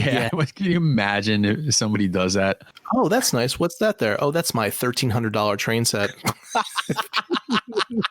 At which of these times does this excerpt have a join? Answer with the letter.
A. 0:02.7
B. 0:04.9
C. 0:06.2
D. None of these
A